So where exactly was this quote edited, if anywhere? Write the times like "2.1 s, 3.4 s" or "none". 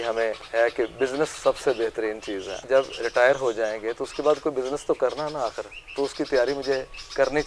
2.5 s